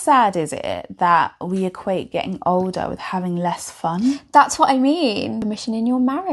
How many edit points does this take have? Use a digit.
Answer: 1